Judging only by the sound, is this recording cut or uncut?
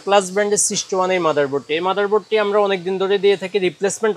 uncut